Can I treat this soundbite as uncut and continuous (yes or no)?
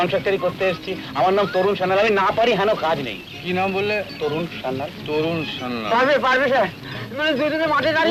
yes